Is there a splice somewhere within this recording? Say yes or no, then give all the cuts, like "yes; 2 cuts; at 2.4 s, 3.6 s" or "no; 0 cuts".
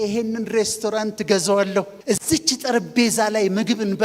yes; 1 cut; at 1.9 s